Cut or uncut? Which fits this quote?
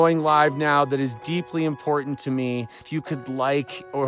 cut